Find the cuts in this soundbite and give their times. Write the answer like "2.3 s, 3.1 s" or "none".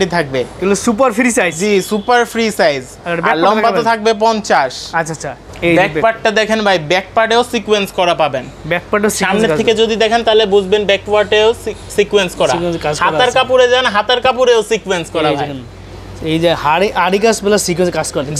none